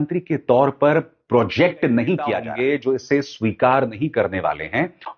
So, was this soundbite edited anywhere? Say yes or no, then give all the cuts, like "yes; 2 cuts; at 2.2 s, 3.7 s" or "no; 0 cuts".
yes; 1 cut; at 2.4 s